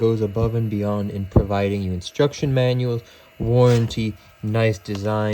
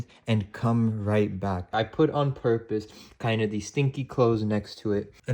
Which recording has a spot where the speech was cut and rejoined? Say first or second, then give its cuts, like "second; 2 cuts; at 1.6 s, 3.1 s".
second; 1 cut; at 1.7 s